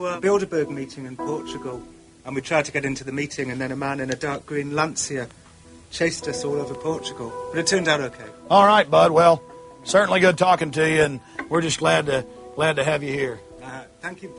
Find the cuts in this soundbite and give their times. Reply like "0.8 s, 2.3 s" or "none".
8.9 s

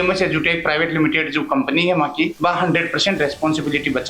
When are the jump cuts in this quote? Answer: 2.3 s

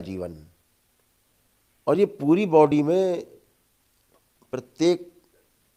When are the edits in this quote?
none

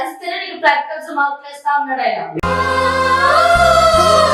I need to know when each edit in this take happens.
none

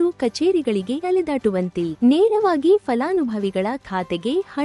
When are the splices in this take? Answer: 1.3 s

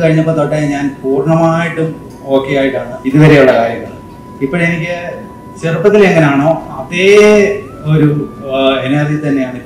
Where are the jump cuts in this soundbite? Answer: 2.9 s

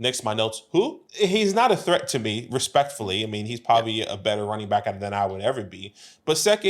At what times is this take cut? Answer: 1.0 s

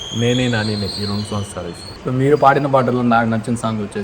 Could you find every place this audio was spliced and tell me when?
1.9 s

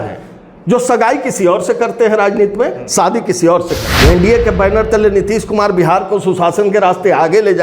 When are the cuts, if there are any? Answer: 3.9 s

